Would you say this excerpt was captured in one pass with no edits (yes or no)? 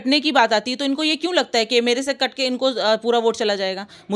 yes